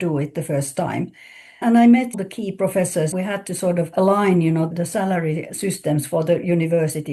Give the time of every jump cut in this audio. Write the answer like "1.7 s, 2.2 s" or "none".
none